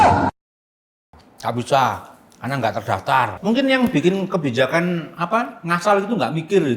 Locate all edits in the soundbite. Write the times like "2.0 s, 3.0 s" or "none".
3.3 s